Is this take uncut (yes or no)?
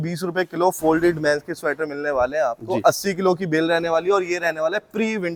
yes